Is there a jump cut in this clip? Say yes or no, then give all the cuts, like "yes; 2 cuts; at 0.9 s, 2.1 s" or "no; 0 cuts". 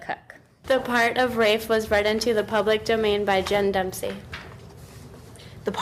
no; 0 cuts